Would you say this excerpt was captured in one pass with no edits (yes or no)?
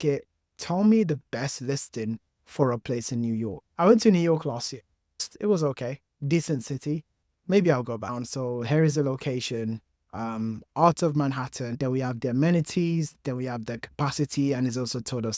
no